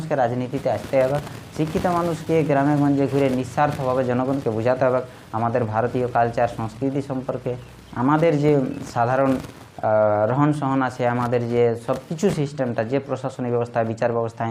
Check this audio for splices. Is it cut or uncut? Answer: uncut